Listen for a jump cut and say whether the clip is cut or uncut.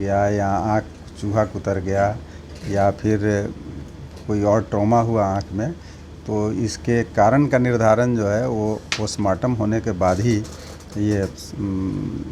uncut